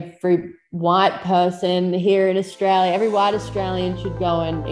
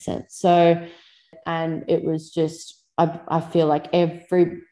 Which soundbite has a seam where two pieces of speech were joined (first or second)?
second